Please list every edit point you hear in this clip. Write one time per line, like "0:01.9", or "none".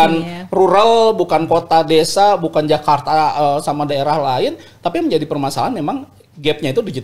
none